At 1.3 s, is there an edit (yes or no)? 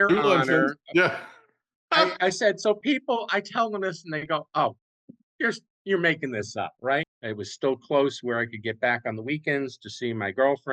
no